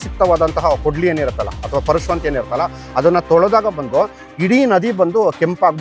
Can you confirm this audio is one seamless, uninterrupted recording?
yes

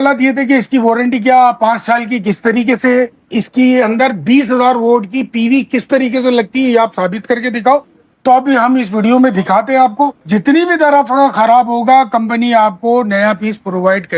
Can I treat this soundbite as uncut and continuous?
no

